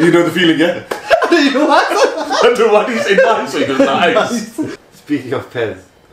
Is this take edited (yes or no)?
yes